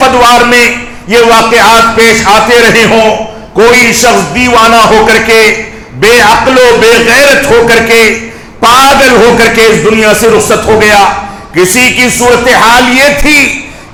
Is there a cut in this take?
no; 0 cuts

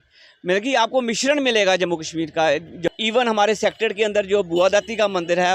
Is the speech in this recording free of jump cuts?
no; 1 cut; at 2.9 s

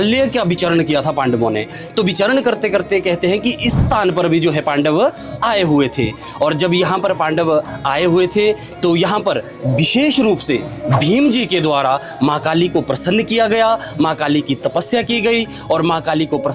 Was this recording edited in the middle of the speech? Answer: yes; 1 cut; at 1.8 s

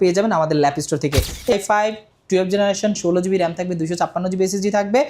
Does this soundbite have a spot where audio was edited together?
yes; 1 cut; at 1.5 s

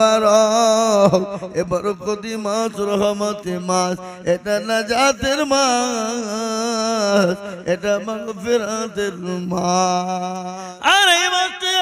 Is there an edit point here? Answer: yes; 1 cut; at 10.4 s

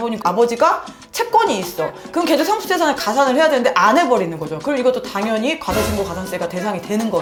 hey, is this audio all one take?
yes; 0 cuts

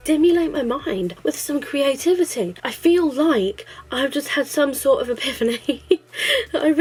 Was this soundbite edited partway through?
no; 0 cuts

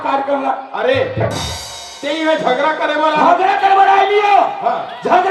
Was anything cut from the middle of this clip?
no; 0 cuts

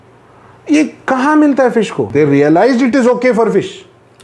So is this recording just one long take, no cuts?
no; 1 cut; at 2.0 s

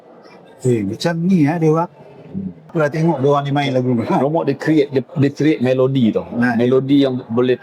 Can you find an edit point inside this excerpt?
yes; 1 cut; at 2.7 s

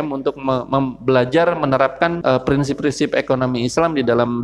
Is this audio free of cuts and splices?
no; 1 cut; at 2.2 s

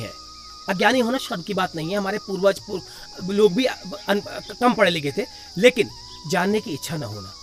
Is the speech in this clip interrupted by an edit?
no; 0 cuts

